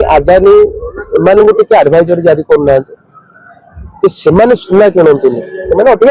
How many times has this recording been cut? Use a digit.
0